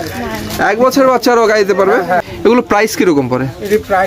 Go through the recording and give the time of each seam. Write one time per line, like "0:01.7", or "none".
0:02.2